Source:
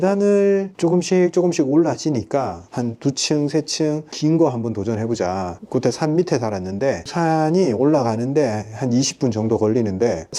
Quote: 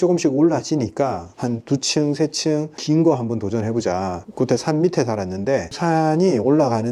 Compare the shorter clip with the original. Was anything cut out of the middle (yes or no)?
no